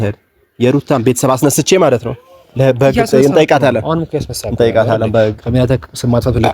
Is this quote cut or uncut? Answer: uncut